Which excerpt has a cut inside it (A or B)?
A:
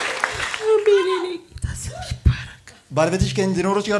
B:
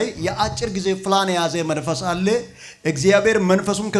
A